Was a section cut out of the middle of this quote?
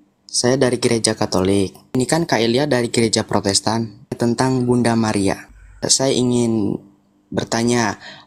yes; 3 cuts; at 2.0 s, 4.2 s, 5.7 s

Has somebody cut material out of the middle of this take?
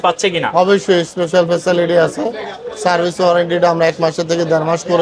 no; 0 cuts

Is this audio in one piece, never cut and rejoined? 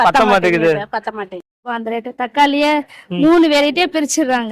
no; 1 cut; at 1.6 s

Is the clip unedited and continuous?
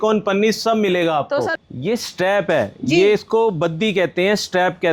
no; 1 cut; at 1.6 s

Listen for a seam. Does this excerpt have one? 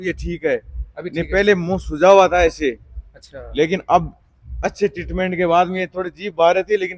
no; 0 cuts

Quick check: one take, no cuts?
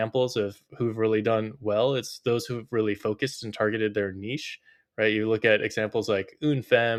yes; 0 cuts

